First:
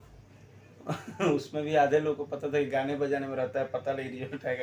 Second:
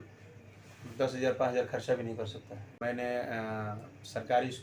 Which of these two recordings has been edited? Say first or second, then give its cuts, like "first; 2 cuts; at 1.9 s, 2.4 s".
second; 1 cut; at 2.8 s